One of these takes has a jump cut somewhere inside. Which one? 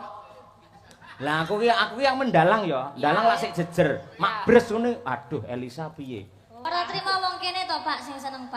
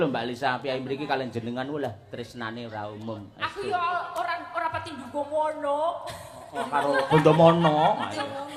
first; 1 cut; at 6.5 s

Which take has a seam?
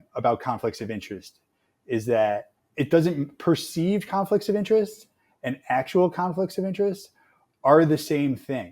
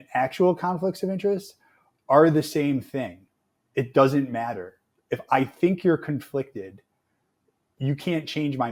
first; 1 cut; at 2.6 s

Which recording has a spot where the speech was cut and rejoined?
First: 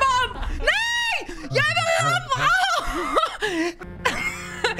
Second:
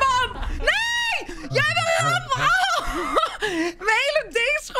first; 1 cut; at 3.8 s

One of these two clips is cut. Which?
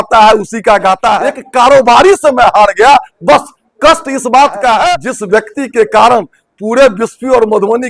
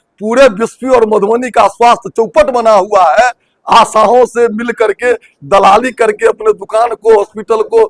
first; 2 cuts; at 1.4 s, 5.1 s

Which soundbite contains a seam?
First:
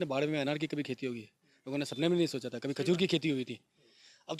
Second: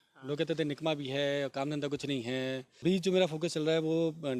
second; 1 cut; at 2.7 s

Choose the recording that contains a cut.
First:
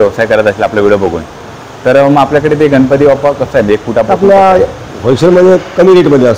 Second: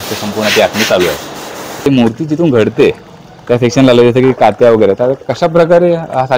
second; 1 cut; at 1.9 s

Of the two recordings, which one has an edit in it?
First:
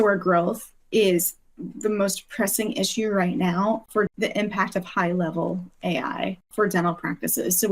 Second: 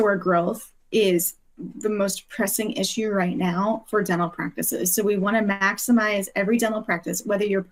first; 2 cuts; at 3.9 s, 6.5 s

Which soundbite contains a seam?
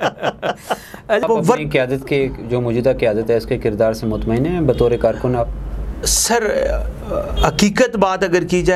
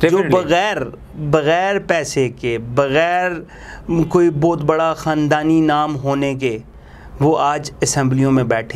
first; 1 cut; at 1.2 s

